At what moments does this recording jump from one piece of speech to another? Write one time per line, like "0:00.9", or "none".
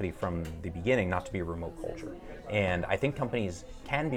none